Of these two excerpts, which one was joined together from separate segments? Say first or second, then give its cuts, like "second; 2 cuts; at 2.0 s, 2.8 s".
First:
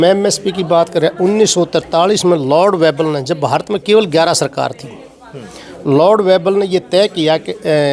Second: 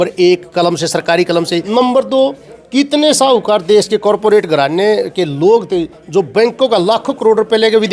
second; 1 cut; at 1.7 s